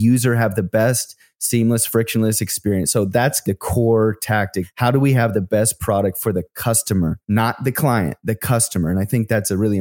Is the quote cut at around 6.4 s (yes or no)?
no